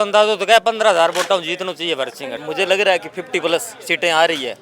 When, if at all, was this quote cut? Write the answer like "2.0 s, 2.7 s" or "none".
2.3 s